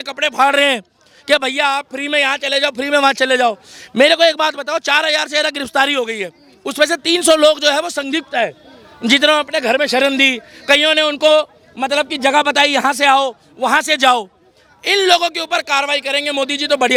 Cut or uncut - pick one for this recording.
uncut